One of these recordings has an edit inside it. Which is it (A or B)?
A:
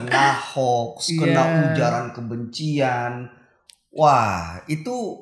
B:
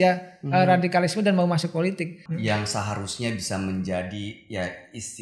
B